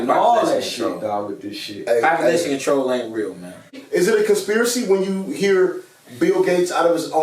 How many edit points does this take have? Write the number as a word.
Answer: one